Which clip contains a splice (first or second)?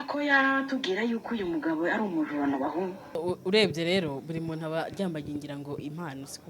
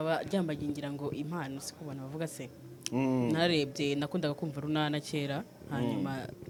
first